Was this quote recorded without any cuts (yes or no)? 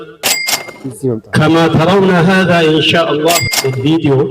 no